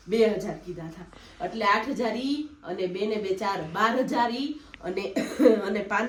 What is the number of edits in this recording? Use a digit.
0